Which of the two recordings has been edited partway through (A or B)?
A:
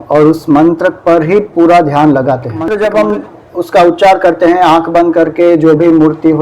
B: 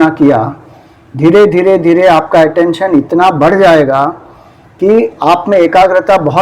A